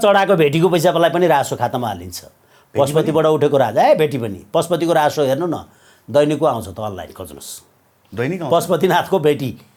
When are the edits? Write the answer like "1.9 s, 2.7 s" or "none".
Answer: none